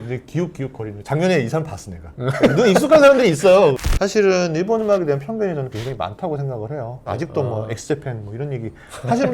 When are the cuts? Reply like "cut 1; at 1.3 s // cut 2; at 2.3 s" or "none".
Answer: cut 1; at 1.0 s // cut 2; at 3.8 s // cut 3; at 7.1 s